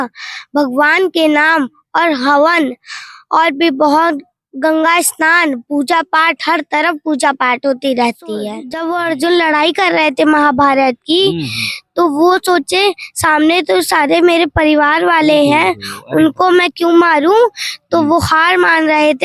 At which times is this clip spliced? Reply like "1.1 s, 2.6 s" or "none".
8.7 s